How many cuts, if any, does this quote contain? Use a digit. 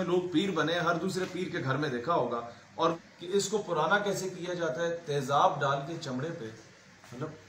1